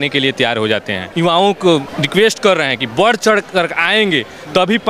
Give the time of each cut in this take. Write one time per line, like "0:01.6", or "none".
0:01.1
0:02.0